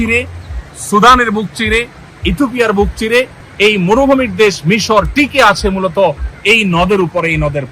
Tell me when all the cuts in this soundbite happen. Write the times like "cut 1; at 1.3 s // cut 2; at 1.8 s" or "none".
cut 1; at 3.4 s